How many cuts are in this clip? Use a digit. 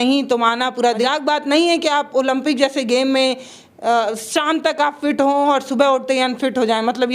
1